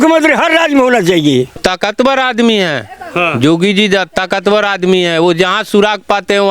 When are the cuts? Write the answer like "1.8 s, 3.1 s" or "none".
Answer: 1.6 s